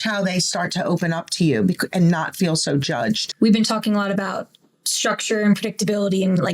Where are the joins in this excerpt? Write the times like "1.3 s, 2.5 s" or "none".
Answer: 3.3 s